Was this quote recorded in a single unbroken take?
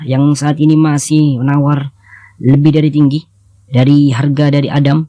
yes; 0 cuts

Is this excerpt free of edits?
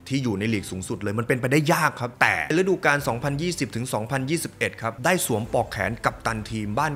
no; 2 cuts; at 2.3 s, 4.9 s

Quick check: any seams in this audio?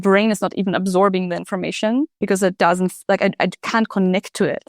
yes; 1 cut; at 2.4 s

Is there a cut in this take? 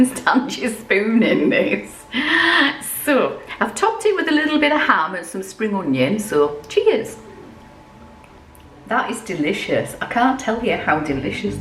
yes; 1 cut; at 8.4 s

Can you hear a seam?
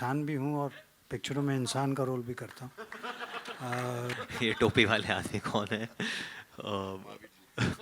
yes; 1 cut; at 4.2 s

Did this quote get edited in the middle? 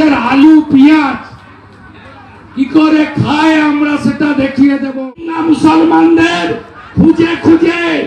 yes; 1 cut; at 5.0 s

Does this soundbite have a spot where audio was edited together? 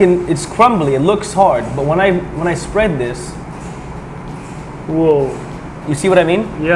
no; 0 cuts

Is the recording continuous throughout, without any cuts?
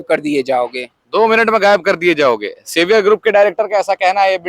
yes; 0 cuts

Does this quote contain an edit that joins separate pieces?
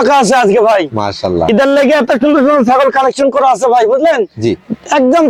no; 0 cuts

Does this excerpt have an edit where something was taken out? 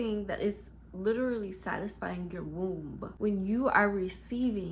yes; 1 cut; at 3.1 s

